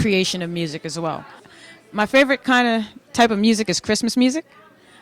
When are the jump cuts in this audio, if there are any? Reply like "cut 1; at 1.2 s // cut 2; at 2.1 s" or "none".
cut 1; at 1.4 s